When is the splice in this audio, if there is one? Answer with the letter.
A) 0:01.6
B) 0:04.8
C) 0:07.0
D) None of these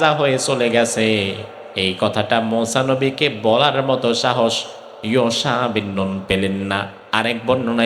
C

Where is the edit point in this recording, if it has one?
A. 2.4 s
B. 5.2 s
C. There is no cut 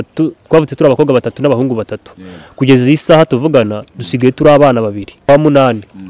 B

